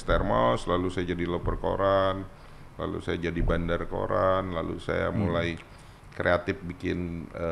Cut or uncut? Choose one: uncut